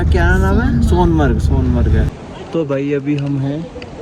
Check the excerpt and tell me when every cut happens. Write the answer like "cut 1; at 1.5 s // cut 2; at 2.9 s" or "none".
cut 1; at 2.1 s